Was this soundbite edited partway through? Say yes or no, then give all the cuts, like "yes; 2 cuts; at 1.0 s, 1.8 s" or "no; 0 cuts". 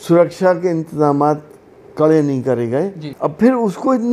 yes; 1 cut; at 3.0 s